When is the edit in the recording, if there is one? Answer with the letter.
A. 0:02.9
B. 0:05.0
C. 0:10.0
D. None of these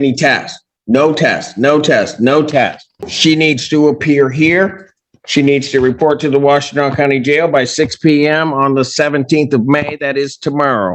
A